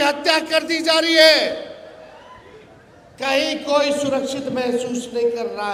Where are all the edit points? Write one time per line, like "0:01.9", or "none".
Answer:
none